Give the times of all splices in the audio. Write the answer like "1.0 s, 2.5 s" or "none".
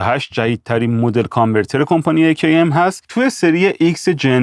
3.0 s